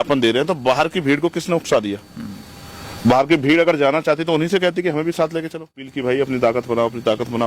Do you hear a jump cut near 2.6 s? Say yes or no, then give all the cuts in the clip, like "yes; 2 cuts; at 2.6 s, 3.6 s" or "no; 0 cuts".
no; 1 cut; at 5.9 s